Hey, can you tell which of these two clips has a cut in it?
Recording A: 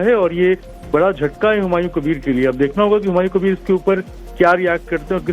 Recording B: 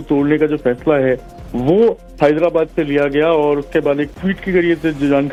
A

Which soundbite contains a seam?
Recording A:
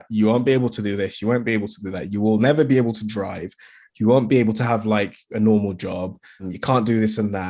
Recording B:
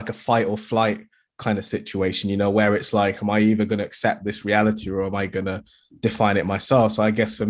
A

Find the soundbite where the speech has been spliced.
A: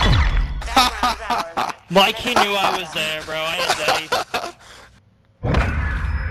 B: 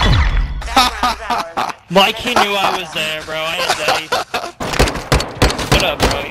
B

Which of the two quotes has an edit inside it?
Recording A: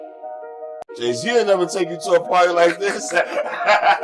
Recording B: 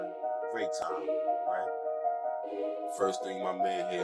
A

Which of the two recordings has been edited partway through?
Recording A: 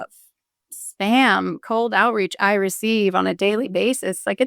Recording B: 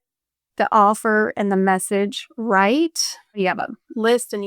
B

